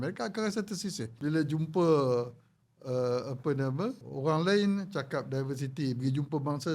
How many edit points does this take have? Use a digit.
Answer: 2